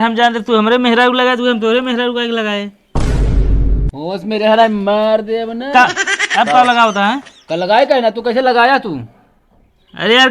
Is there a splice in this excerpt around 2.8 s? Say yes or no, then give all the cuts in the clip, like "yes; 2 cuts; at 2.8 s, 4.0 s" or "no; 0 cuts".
yes; 2 cuts; at 2.8 s, 3.9 s